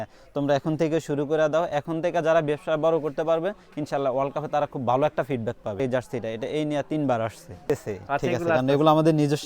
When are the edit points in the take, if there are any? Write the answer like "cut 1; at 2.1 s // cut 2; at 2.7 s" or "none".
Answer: cut 1; at 5.8 s // cut 2; at 7.6 s